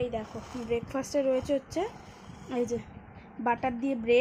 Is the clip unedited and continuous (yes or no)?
yes